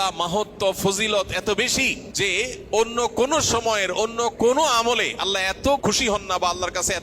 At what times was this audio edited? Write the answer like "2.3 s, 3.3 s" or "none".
2.0 s, 5.8 s